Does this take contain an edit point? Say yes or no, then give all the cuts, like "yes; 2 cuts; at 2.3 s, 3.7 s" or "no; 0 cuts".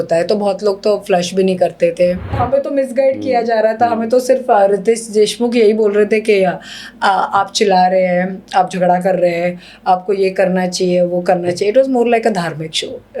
yes; 1 cut; at 2.4 s